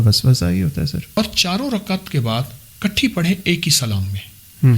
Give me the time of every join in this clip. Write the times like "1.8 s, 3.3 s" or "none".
1.2 s